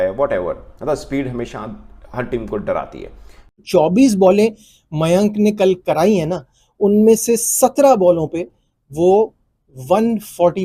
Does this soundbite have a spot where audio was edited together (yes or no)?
yes